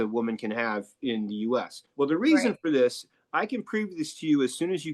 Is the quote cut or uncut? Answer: uncut